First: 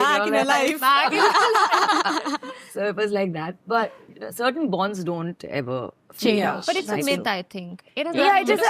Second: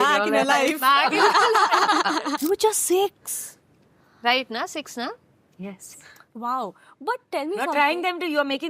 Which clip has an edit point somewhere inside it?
second; 1 cut; at 2.3 s

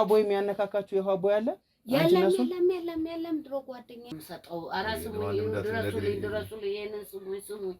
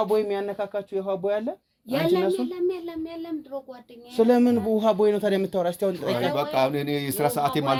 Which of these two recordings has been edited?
first; 1 cut; at 4.0 s

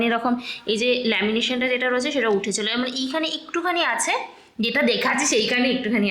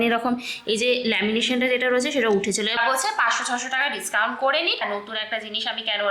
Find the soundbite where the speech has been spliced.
second; 2 cuts; at 2.7 s, 4.8 s

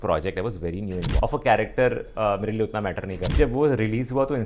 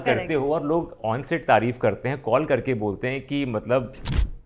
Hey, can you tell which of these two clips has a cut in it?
first; 2 cuts; at 1.0 s, 3.4 s

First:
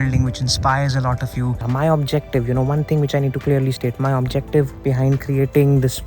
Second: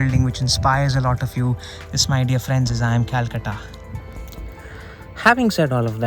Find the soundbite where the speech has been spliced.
first; 1 cut; at 1.7 s

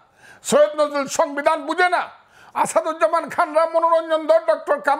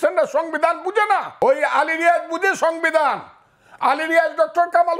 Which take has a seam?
second; 1 cut; at 1.3 s

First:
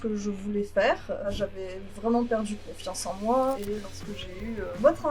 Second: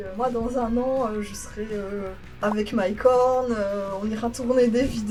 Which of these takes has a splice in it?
first; 2 cuts; at 1.3 s, 3.6 s

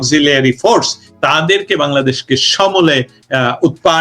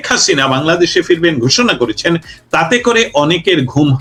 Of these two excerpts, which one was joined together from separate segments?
first; 1 cut; at 1.0 s

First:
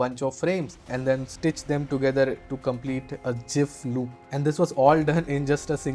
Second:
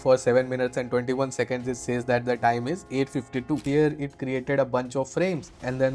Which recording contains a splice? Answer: second; 1 cut; at 3.6 s

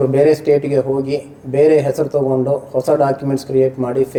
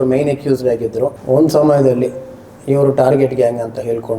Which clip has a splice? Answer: second; 1 cut; at 1.2 s

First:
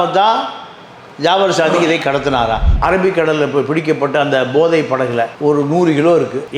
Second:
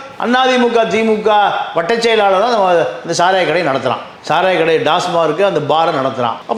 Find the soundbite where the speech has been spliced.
first; 1 cut; at 2.8 s

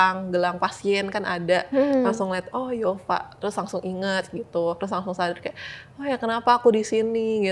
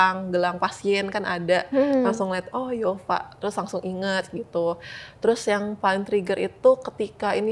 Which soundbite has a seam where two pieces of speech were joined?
first; 1 cut; at 4.8 s

